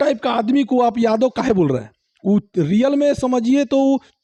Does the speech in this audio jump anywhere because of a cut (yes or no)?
no